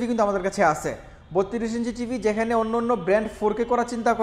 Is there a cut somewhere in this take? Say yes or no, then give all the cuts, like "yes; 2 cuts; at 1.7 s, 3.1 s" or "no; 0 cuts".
no; 0 cuts